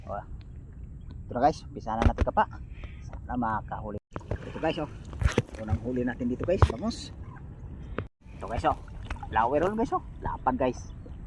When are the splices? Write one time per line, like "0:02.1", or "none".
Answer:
0:04.0
0:08.1

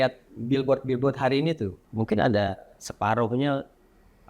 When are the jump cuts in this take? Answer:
0:01.8

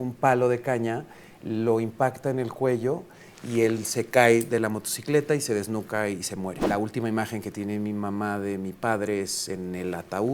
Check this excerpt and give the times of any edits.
0:06.7

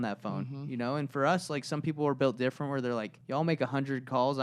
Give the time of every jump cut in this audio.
0:03.2

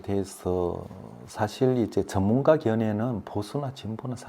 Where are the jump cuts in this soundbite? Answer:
none

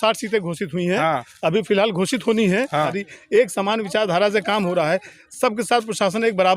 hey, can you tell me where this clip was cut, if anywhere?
0:03.0

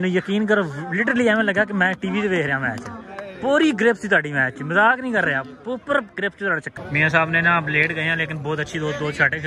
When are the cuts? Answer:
0:06.7

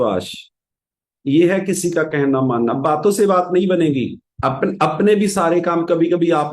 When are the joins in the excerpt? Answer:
0:04.2

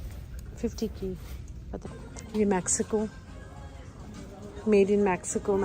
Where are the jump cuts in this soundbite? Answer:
0:01.8

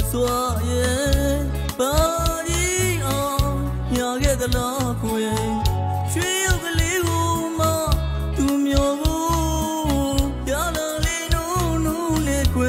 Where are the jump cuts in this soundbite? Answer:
none

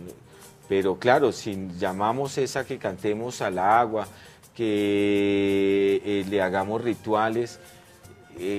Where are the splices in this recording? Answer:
0:02.3

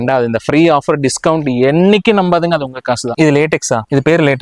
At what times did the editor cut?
0:03.1

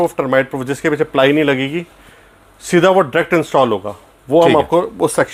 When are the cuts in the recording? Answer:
none

